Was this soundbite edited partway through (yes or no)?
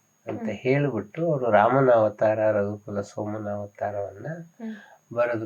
no